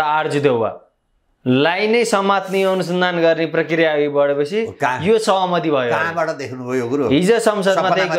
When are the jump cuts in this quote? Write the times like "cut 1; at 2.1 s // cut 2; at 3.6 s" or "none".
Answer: none

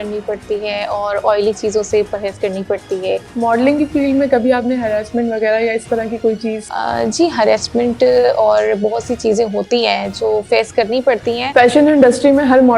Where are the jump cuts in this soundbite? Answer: cut 1; at 3.2 s // cut 2; at 6.7 s // cut 3; at 11.4 s

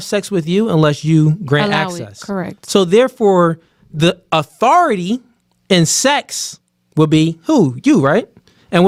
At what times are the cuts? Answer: none

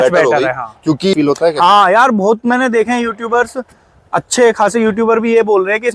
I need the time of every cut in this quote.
cut 1; at 1.1 s

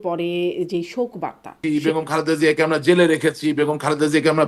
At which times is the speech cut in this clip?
cut 1; at 1.6 s

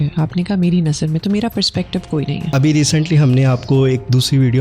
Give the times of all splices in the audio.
cut 1; at 2.5 s

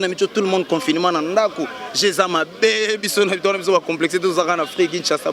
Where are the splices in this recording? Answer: none

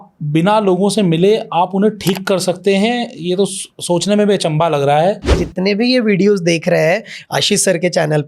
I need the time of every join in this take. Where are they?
cut 1; at 5.4 s

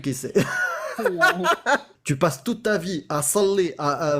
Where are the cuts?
cut 1; at 1.9 s

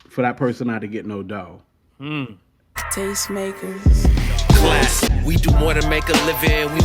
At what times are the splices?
cut 1; at 2.8 s

